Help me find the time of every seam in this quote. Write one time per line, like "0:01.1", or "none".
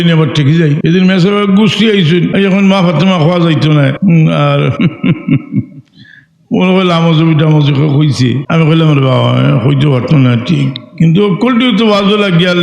0:00.8
0:02.3
0:04.0
0:04.7
0:08.4

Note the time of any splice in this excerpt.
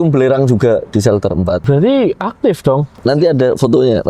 0:01.6
0:02.9

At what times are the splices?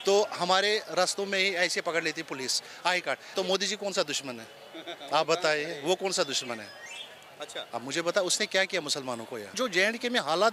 0:03.2
0:09.5

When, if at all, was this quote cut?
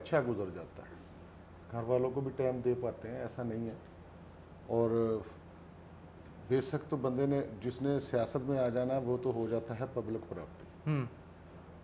none

